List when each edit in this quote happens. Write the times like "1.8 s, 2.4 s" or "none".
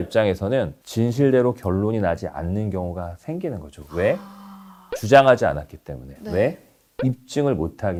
none